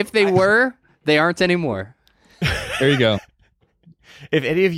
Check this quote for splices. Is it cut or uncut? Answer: uncut